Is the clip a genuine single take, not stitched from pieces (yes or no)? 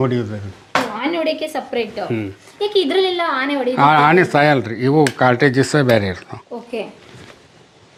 yes